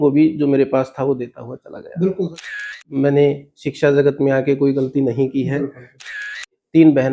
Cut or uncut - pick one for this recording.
cut